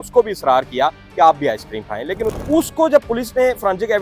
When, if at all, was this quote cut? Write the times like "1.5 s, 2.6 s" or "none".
2.3 s